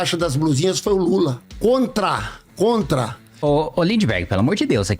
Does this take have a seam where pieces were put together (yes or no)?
yes